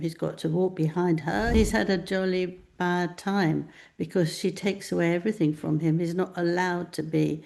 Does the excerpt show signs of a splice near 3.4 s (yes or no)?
no